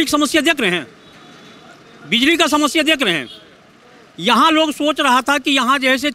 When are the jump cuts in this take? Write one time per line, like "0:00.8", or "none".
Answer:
none